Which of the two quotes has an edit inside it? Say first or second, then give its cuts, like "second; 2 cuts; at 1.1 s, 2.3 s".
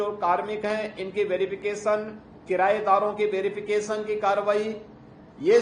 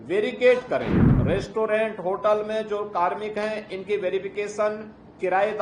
second; 1 cut; at 1.1 s